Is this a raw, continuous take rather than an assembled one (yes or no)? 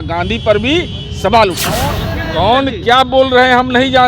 no